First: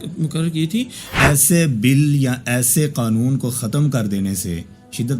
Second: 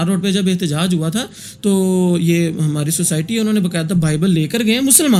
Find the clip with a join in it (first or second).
first